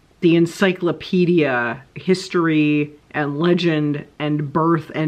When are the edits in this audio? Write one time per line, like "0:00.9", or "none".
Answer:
0:01.9

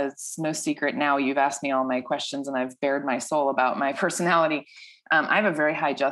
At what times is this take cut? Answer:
none

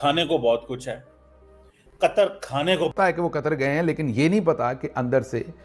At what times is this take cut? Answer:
0:03.0

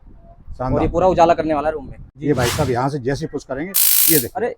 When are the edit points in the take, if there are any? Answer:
0:02.0

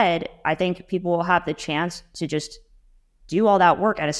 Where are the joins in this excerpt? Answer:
none

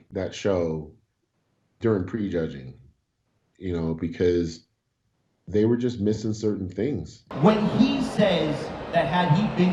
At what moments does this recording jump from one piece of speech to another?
none

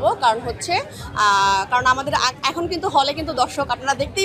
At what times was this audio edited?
none

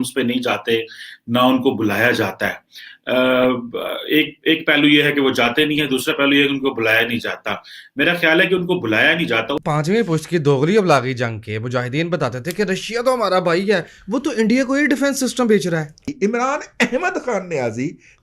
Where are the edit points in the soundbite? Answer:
0:09.6
0:16.2

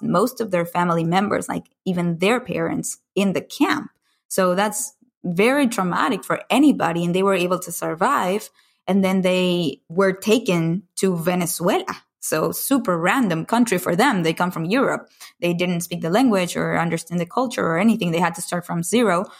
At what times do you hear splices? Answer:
0:09.8
0:17.3

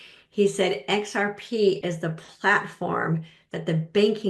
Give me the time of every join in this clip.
none

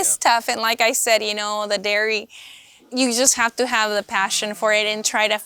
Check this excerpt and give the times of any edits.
0:02.9

